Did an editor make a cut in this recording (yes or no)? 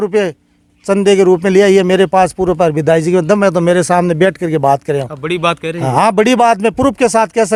no